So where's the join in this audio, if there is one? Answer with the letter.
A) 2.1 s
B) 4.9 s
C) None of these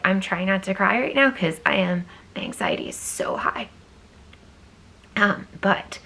C